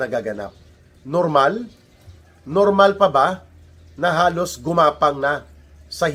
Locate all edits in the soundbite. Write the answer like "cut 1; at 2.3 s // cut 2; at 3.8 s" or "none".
none